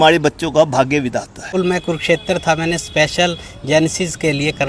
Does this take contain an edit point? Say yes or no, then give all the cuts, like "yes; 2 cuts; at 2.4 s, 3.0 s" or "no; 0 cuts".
yes; 1 cut; at 1.5 s